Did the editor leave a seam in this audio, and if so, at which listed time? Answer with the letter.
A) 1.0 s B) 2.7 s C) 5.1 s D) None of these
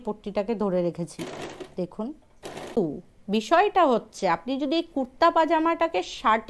B